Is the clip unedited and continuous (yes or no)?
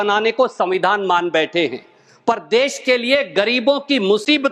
yes